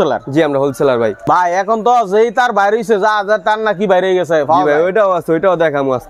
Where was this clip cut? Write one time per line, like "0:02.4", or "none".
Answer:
0:01.2